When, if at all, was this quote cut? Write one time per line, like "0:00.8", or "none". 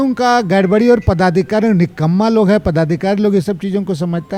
none